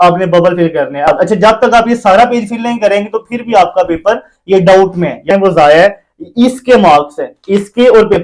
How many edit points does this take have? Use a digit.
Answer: 2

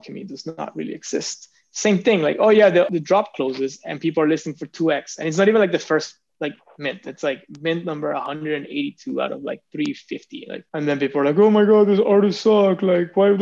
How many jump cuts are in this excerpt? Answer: 1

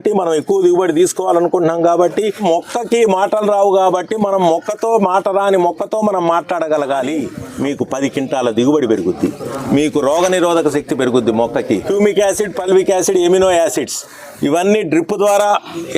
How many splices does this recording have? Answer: 3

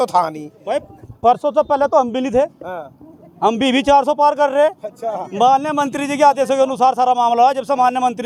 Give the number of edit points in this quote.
0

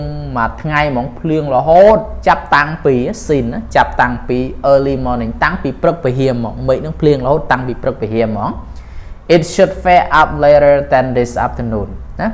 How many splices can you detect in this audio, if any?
0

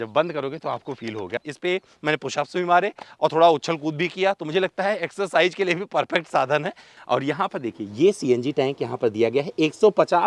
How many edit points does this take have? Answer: 2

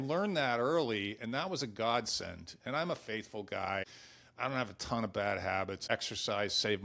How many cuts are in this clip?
2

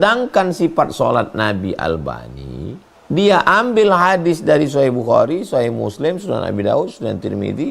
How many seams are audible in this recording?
1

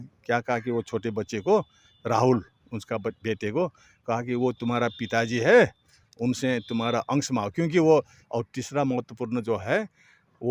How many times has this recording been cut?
1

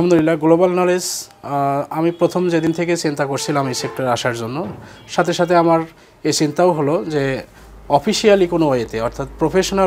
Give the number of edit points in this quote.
0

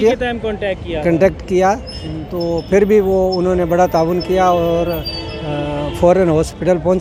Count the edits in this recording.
0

